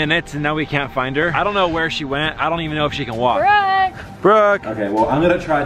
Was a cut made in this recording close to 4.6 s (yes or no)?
yes